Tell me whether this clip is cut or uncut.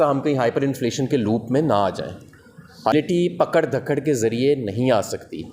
cut